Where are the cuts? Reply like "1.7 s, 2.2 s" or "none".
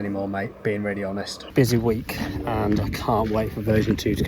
1.4 s